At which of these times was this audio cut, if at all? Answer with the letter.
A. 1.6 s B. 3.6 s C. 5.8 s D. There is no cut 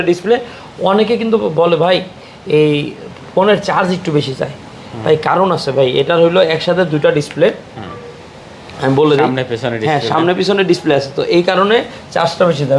D